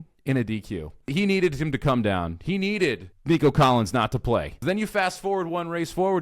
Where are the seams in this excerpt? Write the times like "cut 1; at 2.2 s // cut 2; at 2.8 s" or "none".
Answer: cut 1; at 1.1 s // cut 2; at 3.1 s // cut 3; at 4.5 s